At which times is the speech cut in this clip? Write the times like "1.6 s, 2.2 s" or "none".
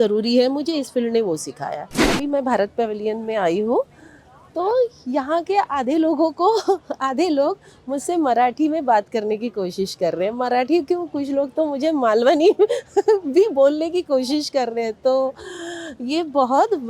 2.1 s